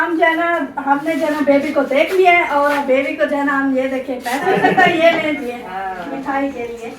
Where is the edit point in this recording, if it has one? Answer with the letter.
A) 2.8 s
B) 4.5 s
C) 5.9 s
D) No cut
B